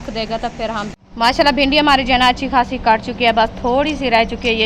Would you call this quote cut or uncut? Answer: cut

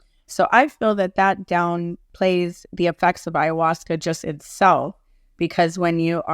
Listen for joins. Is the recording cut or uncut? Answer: cut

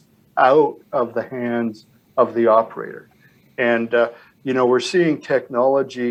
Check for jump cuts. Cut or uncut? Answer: uncut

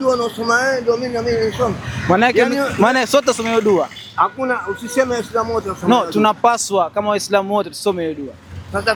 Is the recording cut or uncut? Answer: uncut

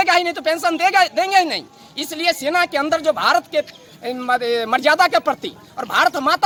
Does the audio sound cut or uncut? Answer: uncut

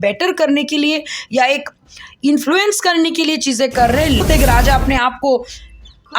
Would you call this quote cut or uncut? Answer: cut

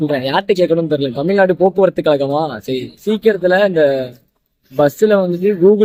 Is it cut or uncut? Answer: uncut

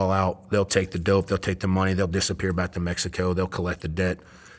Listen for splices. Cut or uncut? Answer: uncut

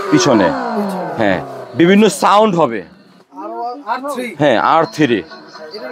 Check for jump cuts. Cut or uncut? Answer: uncut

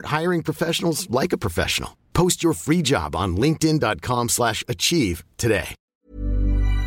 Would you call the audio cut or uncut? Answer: cut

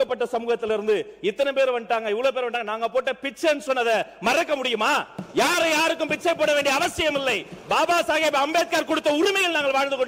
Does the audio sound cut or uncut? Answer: uncut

